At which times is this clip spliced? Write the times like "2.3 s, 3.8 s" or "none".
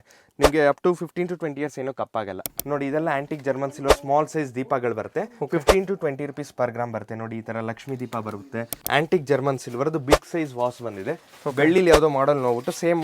2.5 s, 8.8 s